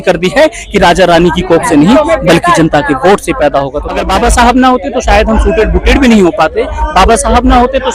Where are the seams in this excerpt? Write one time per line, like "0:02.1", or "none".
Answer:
0:03.9